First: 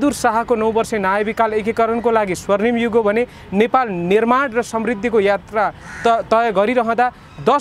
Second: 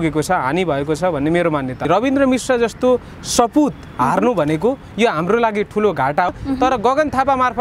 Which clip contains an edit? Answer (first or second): second